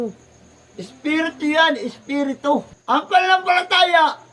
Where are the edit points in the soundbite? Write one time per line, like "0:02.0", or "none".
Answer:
0:02.7